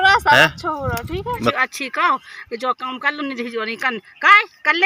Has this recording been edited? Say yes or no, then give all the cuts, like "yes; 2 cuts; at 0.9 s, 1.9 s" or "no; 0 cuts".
yes; 1 cut; at 1.5 s